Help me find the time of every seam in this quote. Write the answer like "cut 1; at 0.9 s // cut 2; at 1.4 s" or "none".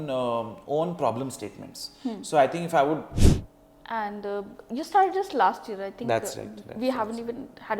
cut 1; at 3.1 s